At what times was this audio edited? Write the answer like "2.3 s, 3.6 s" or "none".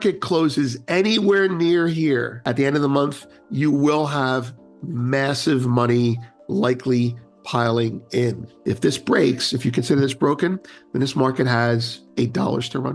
2.3 s, 8.5 s, 12.0 s